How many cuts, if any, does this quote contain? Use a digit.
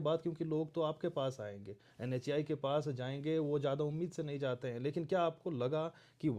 0